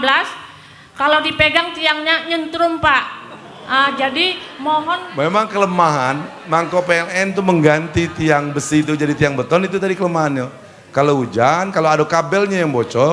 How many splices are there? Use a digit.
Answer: 1